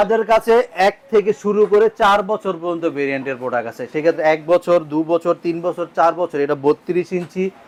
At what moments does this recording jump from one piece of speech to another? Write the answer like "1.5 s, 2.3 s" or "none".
none